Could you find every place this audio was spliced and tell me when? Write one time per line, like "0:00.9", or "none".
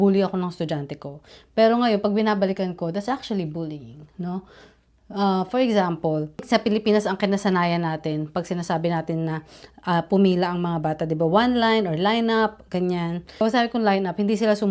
none